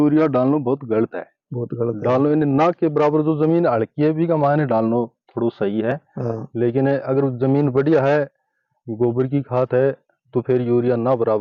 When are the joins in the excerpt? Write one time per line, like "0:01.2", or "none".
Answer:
none